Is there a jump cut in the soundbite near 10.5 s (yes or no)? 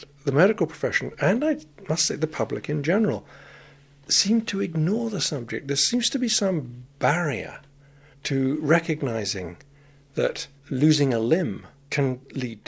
yes